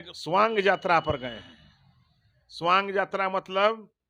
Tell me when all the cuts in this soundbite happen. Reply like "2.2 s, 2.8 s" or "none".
none